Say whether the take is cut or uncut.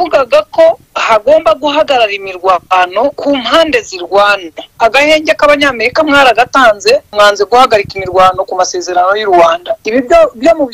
cut